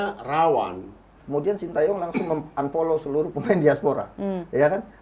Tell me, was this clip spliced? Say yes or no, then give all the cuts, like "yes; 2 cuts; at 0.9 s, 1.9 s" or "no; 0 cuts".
yes; 1 cut; at 1.2 s